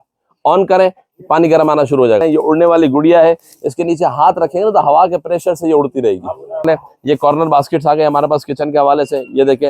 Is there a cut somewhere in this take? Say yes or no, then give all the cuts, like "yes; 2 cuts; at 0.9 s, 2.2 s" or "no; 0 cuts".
yes; 2 cuts; at 2.2 s, 6.6 s